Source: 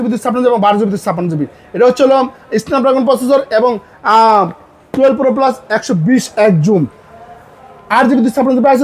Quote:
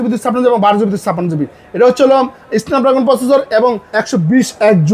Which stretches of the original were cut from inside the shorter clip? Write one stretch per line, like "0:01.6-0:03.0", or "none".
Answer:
0:03.9-0:05.7